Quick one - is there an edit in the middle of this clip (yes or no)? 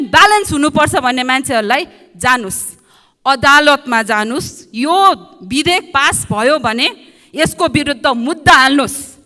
no